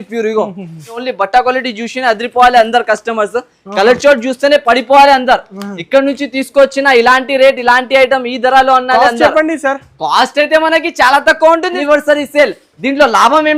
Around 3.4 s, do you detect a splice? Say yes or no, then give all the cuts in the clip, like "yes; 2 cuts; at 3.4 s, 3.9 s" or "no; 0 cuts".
no; 2 cuts; at 1.0 s, 11.8 s